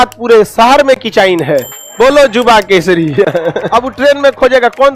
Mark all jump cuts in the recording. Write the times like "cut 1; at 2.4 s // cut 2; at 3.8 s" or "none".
cut 1; at 3.6 s